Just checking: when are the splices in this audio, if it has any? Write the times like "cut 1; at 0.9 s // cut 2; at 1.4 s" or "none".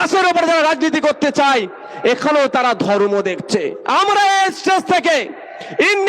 cut 1; at 3.8 s